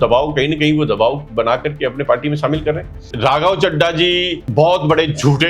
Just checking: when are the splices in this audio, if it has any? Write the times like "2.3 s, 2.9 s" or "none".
3.1 s, 4.4 s